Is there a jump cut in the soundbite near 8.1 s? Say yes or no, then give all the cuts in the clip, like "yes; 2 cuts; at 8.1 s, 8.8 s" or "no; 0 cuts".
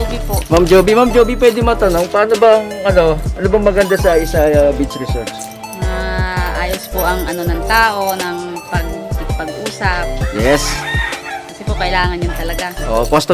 no; 0 cuts